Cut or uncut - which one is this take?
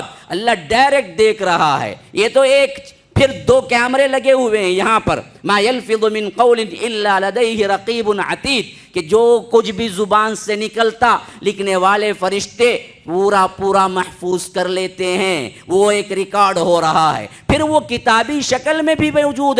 uncut